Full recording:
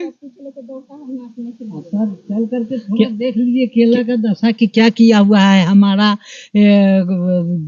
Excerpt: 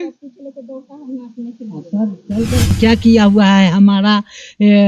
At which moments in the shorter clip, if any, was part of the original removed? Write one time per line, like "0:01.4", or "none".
0:02.8

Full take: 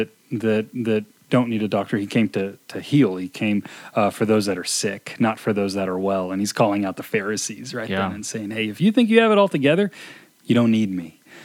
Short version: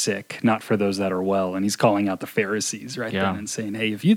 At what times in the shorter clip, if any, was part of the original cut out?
none

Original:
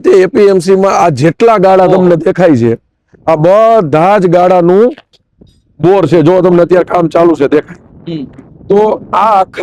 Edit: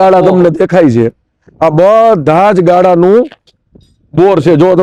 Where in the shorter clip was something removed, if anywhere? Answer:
none

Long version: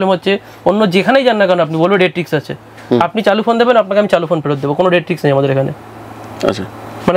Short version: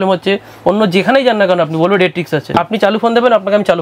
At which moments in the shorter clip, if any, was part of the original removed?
0:02.5

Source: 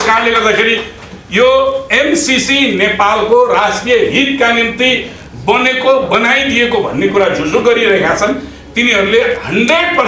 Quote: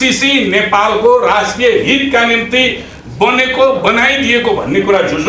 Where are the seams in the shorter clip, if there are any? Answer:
none

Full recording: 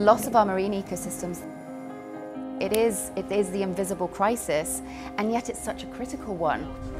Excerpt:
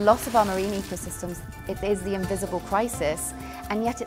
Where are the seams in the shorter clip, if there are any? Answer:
0:01.6

